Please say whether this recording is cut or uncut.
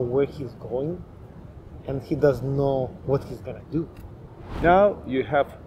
cut